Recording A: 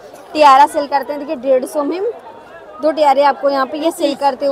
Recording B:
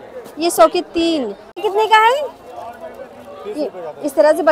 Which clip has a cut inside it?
B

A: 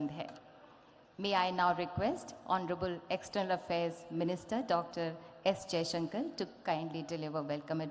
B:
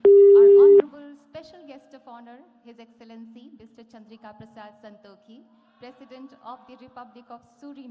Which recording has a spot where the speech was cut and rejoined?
B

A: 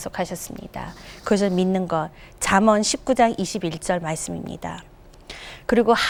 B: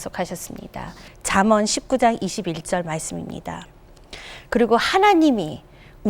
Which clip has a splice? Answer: B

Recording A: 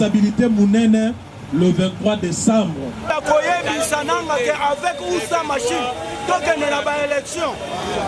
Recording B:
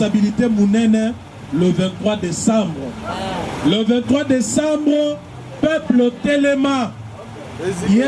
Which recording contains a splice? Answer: A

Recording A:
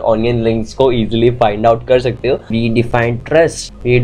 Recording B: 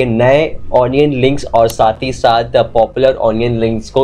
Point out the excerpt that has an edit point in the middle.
A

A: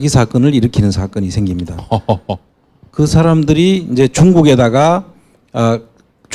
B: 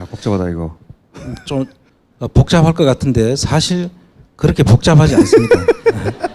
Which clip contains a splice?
A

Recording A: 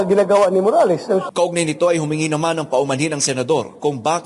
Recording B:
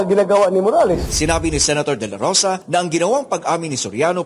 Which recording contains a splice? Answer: B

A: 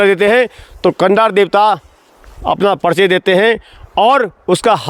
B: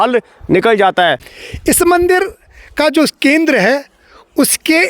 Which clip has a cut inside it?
B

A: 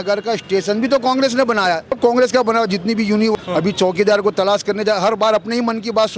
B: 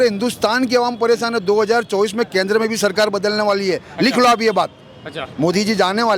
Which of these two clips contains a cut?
A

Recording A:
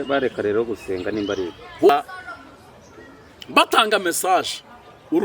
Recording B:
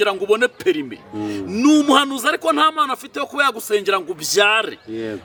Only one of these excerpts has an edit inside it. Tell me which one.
A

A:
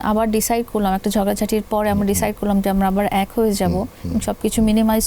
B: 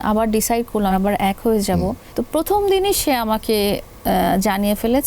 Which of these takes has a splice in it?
B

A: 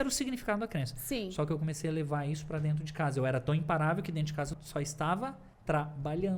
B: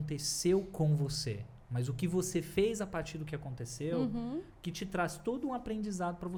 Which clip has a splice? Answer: A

